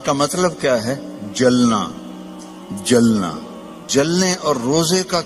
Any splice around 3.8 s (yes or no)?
yes